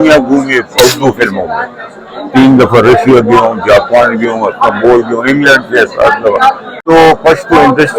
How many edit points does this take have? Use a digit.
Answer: 1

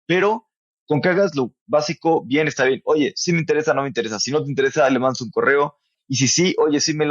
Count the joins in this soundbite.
1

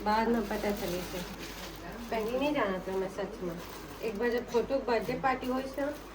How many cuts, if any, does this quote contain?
1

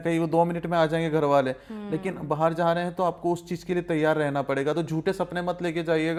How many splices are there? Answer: 0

